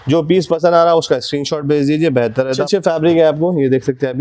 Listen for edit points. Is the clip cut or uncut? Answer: cut